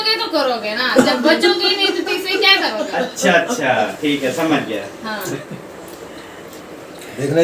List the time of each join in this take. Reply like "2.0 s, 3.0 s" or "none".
5.4 s